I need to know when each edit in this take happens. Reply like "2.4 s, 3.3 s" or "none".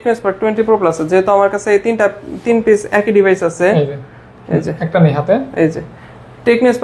none